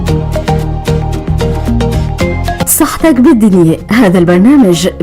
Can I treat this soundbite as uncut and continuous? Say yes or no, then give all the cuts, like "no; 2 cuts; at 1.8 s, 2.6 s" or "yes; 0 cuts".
yes; 0 cuts